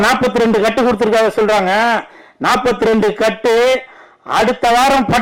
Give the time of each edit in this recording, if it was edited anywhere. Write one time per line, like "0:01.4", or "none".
none